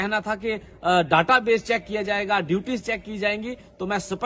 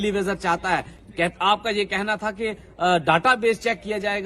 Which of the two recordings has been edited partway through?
second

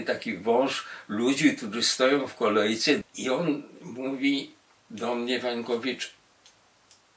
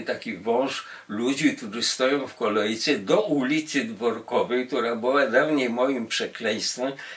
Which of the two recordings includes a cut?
first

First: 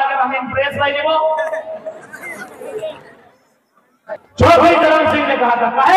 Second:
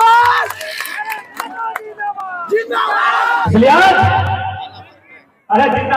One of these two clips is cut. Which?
first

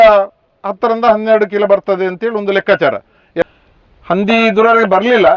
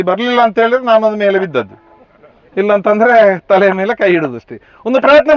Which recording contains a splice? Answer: first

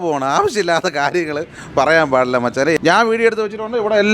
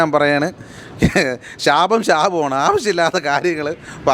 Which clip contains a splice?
first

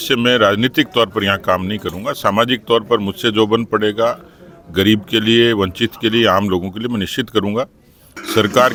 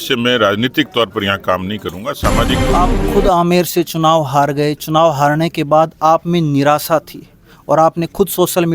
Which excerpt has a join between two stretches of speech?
second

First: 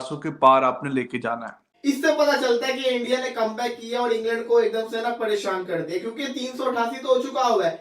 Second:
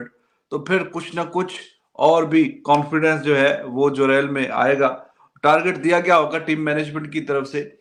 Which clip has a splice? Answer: first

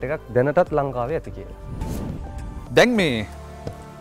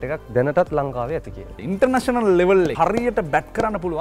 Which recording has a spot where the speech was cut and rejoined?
second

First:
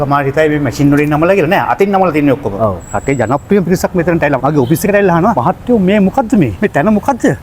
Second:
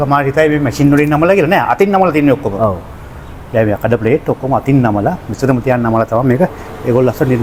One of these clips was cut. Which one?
first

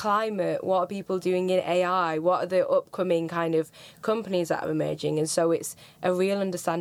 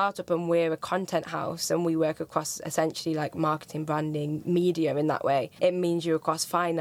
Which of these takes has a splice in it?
second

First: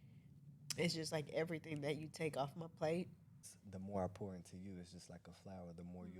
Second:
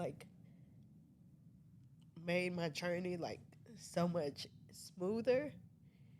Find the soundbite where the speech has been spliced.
first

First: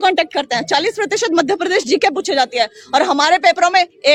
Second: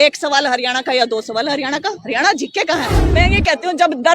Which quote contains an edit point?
second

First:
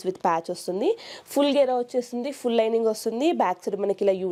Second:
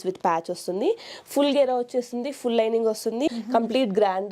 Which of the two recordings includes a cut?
second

